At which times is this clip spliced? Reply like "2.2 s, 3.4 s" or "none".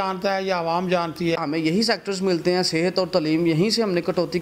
1.4 s